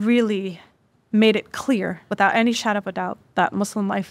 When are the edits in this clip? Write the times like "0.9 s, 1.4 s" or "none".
2.0 s